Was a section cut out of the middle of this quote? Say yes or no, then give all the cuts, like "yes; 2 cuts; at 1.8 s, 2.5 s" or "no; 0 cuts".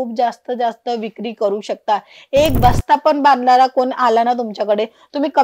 no; 0 cuts